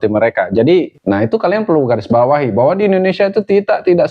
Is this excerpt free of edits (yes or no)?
no